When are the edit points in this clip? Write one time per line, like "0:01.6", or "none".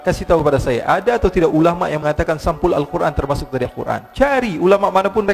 none